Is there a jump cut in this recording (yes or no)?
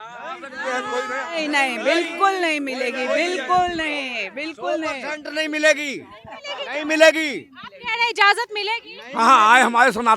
no